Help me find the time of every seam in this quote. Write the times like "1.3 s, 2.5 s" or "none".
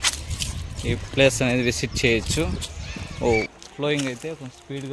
3.6 s